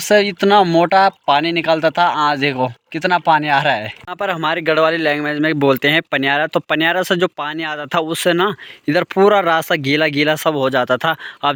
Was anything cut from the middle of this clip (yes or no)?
no